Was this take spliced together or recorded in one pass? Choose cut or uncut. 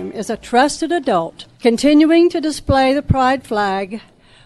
cut